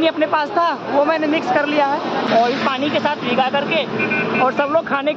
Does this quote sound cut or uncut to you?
cut